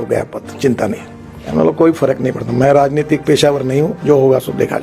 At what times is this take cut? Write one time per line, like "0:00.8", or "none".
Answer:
0:01.4